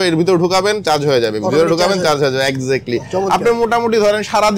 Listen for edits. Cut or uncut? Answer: uncut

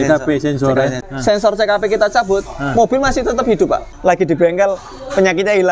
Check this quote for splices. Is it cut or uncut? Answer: cut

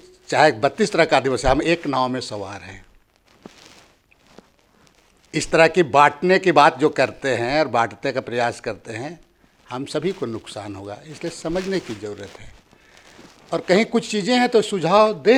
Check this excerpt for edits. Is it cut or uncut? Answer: uncut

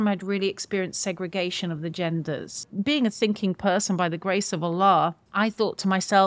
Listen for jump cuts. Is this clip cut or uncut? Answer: cut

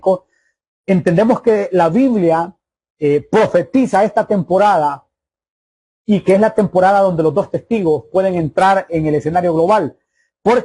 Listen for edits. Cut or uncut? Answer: uncut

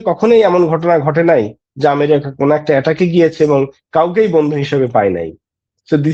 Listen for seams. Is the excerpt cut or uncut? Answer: uncut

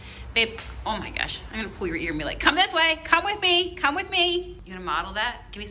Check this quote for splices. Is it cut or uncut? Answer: cut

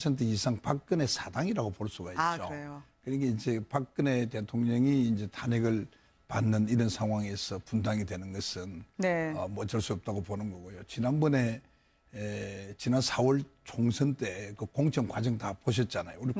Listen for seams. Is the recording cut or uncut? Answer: cut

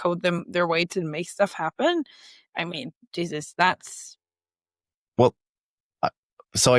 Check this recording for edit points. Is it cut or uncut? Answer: uncut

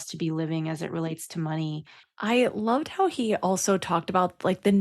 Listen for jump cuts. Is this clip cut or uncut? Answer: cut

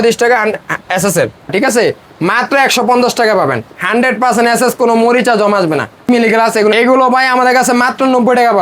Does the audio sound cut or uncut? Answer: cut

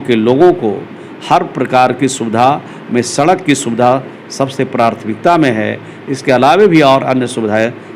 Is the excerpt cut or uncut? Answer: uncut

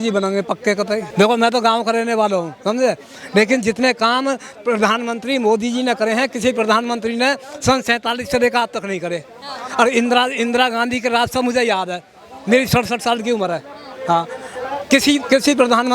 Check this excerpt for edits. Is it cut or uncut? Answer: cut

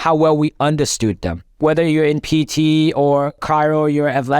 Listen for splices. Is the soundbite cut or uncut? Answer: cut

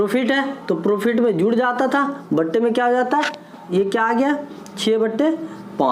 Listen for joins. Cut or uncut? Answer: cut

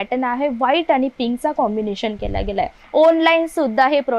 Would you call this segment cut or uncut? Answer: cut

